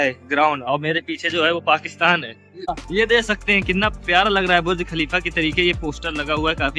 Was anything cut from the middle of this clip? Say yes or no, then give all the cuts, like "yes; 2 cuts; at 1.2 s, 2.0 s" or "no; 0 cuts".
yes; 1 cut; at 2.8 s